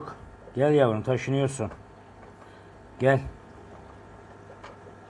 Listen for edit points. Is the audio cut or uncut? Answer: uncut